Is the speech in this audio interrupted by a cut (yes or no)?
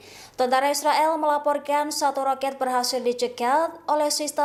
no